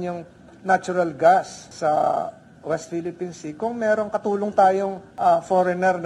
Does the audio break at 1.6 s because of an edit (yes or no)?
yes